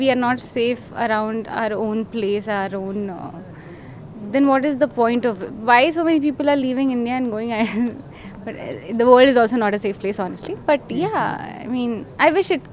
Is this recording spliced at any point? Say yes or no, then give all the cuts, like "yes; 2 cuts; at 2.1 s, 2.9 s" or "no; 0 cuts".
no; 0 cuts